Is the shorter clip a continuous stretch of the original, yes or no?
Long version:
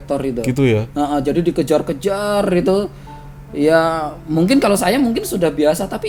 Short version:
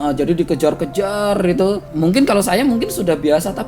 no